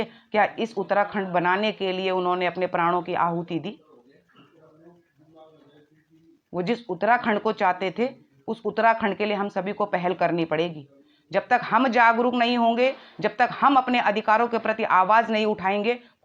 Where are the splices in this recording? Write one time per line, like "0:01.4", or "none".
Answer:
none